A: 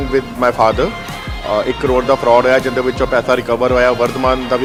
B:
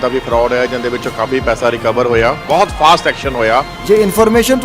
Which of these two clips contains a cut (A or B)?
B